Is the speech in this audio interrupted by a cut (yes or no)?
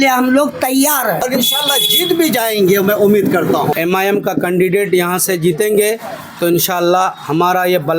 yes